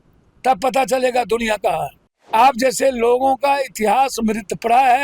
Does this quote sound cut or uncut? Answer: cut